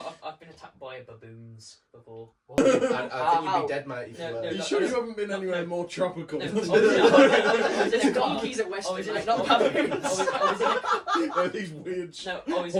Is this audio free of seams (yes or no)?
yes